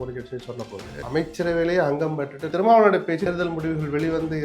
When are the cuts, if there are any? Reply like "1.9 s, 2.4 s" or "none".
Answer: 0.9 s, 2.5 s, 3.3 s